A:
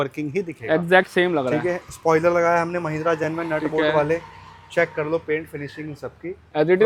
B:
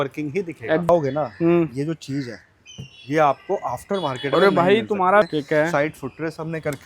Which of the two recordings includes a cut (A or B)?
B